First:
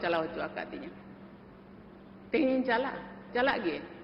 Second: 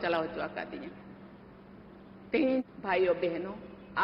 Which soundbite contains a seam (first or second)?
second